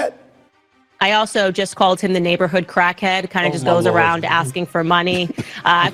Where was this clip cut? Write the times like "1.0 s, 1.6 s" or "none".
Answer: none